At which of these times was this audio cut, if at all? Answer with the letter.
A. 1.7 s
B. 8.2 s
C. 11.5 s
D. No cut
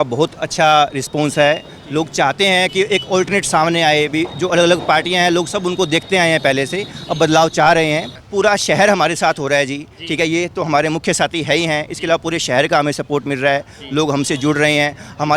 B